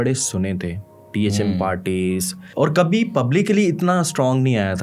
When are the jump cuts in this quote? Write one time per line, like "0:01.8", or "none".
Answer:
0:02.4